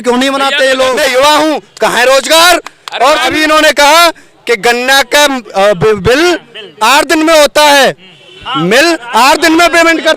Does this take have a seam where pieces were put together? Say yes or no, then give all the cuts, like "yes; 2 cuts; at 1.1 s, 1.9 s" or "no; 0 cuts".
yes; 2 cuts; at 1.0 s, 3.3 s